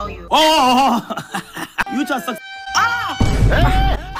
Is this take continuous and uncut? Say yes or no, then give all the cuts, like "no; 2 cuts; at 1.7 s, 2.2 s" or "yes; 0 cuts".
no; 1 cut; at 1.8 s